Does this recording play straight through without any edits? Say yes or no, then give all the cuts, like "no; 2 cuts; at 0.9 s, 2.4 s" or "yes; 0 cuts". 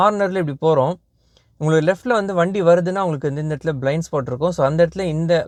yes; 0 cuts